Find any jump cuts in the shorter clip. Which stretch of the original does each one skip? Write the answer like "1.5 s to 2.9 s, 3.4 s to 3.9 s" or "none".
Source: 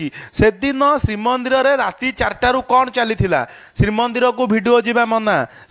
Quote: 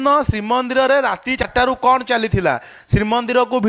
2.2 s to 2.3 s